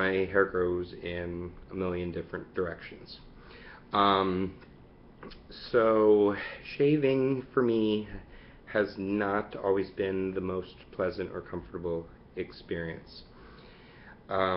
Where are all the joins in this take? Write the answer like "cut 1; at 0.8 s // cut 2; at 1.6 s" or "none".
cut 1; at 6.0 s